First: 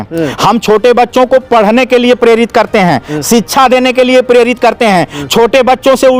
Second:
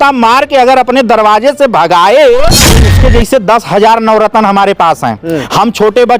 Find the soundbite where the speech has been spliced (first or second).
second